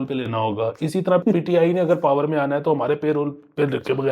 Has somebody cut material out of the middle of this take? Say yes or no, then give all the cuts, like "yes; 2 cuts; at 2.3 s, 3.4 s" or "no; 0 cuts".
yes; 1 cut; at 1.2 s